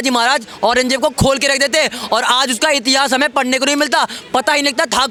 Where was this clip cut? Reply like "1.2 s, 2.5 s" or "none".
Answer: none